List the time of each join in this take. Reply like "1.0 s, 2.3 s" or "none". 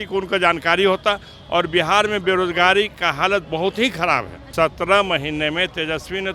4.4 s